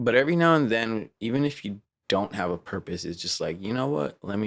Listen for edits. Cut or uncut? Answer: uncut